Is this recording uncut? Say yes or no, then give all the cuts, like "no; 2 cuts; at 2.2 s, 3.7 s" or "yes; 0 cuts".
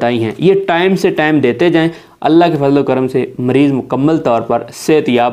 yes; 0 cuts